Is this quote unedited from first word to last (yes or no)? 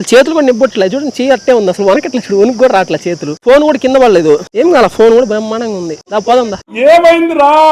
yes